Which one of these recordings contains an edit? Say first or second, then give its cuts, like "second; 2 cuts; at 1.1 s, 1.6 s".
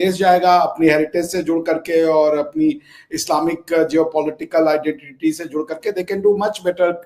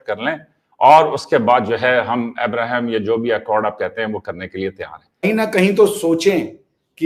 second; 1 cut; at 5.2 s